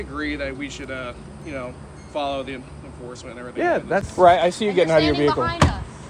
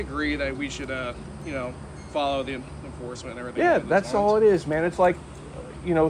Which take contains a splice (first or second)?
first